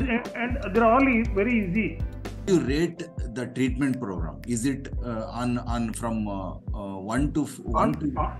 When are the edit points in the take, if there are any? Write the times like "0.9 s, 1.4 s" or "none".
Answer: 2.5 s